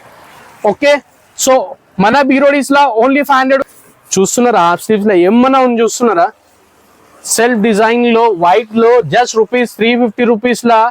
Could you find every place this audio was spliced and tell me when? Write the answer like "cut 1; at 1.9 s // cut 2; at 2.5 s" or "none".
cut 1; at 3.7 s